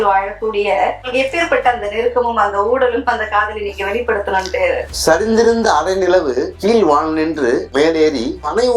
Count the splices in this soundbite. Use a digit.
2